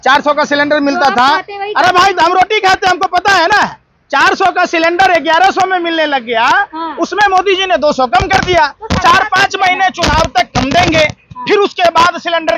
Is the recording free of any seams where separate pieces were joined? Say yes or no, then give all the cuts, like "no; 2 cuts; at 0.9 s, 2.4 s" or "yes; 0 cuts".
yes; 0 cuts